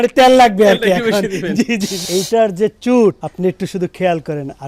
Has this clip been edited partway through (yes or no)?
yes